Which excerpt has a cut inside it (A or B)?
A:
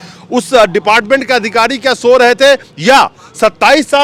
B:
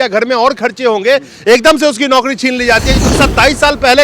B